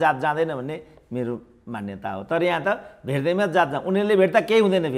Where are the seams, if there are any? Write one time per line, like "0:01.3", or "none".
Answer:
none